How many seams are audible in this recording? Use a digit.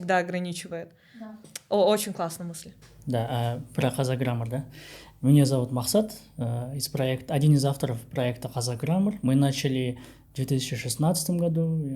0